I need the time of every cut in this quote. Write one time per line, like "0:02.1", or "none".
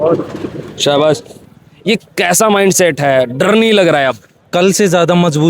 0:01.5

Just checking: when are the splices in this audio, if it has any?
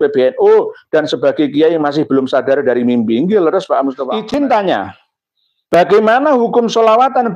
0:04.1

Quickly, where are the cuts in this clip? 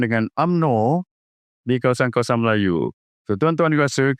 none

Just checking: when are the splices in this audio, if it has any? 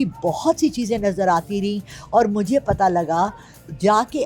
none

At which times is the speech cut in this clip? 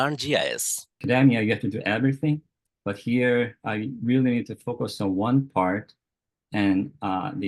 0:00.9

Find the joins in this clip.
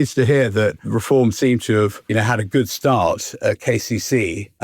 0:00.9
0:02.0

